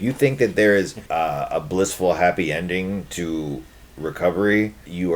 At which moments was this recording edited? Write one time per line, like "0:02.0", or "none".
0:01.0